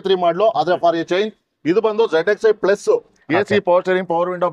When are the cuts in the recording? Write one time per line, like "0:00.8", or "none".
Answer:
0:03.1